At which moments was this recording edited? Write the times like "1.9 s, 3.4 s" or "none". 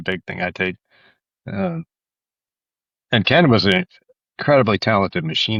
none